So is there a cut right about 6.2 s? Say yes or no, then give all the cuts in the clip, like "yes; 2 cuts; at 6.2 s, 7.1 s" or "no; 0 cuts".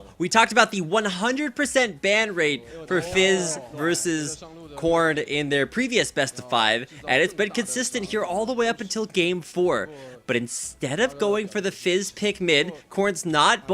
yes; 1 cut; at 6.2 s